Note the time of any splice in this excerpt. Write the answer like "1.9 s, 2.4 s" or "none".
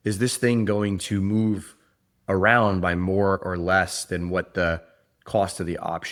none